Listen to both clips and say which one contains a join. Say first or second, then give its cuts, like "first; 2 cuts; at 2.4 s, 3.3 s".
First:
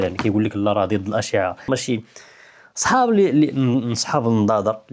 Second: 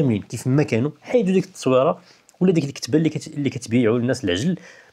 first; 1 cut; at 1.7 s